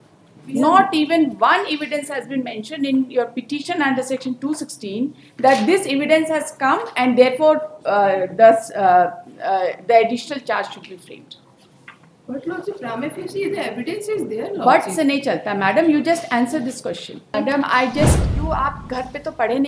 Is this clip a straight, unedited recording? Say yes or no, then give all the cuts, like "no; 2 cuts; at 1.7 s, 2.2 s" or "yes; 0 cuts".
no; 1 cut; at 17.3 s